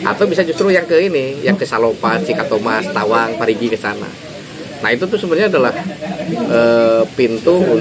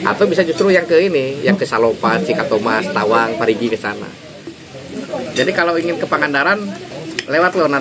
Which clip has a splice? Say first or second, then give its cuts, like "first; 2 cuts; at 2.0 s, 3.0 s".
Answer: second; 1 cut; at 4.6 s